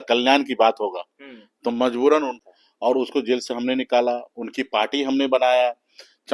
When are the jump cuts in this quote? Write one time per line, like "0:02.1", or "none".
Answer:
0:02.3

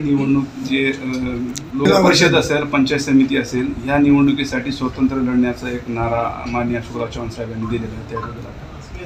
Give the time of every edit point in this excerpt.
0:01.9

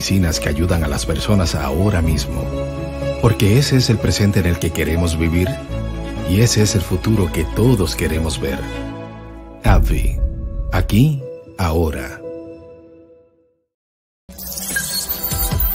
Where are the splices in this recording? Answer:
0:14.3

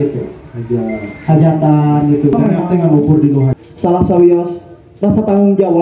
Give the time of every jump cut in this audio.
0:03.5

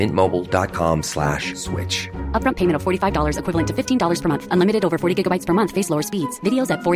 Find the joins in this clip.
none

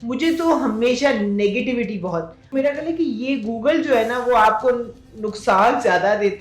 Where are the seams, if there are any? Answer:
0:02.5

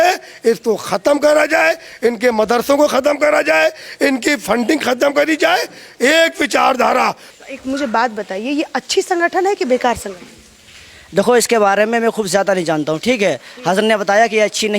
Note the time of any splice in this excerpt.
0:07.3

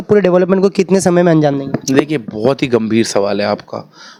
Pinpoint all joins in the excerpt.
none

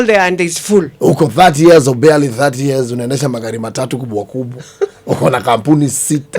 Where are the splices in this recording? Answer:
0:00.9

